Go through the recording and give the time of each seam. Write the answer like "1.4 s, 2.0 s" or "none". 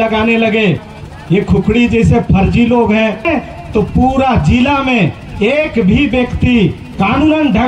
0.9 s, 3.3 s

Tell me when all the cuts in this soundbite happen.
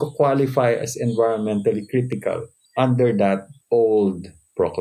2.5 s, 3.5 s

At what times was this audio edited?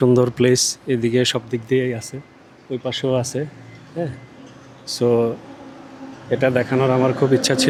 none

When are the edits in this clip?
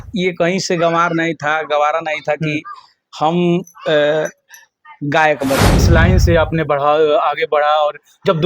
5.8 s

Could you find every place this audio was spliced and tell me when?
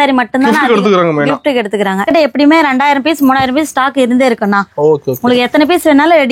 2.1 s

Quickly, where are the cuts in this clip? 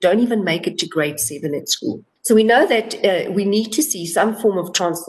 2.1 s

